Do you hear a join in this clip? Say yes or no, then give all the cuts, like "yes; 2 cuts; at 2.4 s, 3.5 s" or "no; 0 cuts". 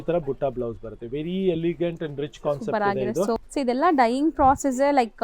yes; 1 cut; at 3.4 s